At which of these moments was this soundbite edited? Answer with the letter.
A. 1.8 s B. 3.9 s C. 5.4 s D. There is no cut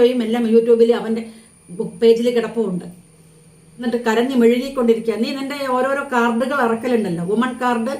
B